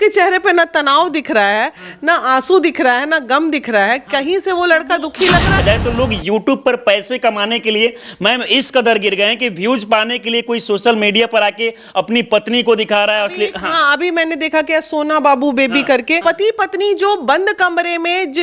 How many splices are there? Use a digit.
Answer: 2